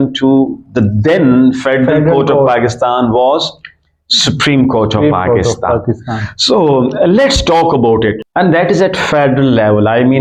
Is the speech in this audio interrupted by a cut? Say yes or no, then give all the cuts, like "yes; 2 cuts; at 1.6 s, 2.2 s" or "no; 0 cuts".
yes; 1 cut; at 8.2 s